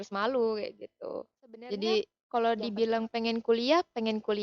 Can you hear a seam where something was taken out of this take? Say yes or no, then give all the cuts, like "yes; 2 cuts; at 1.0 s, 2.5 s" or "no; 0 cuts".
yes; 1 cut; at 2.2 s